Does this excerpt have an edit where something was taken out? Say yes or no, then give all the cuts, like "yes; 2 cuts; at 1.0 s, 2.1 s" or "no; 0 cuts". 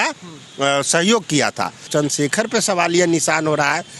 yes; 1 cut; at 1.8 s